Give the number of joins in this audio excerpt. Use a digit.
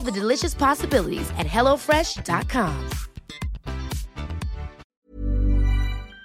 1